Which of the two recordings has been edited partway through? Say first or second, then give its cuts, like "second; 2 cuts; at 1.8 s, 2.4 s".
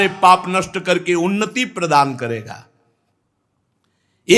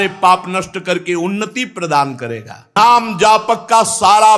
second; 1 cut; at 2.7 s